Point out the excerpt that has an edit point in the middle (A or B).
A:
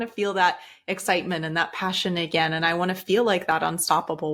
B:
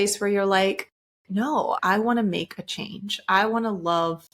B